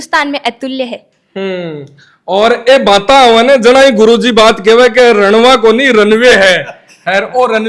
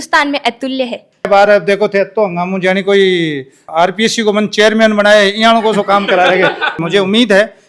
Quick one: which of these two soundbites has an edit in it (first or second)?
second